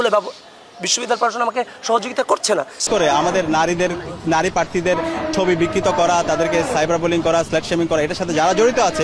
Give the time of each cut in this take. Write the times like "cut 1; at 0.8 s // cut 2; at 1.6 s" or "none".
cut 1; at 2.8 s